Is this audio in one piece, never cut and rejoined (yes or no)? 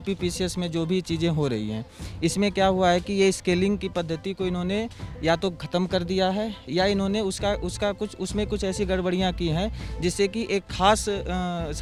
yes